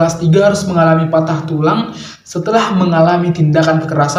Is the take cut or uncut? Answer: uncut